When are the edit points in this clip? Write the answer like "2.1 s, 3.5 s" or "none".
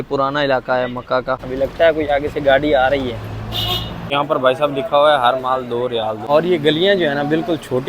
1.4 s, 4.1 s, 6.2 s